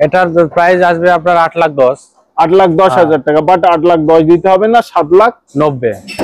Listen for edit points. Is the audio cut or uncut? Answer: uncut